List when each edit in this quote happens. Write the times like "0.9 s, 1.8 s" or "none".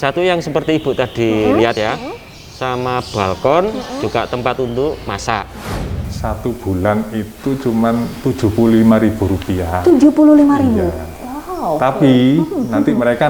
6.0 s